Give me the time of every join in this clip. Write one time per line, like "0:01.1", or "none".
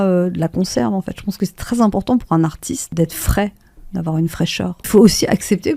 0:02.9
0:04.9

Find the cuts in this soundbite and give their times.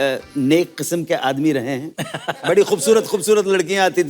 0:01.9

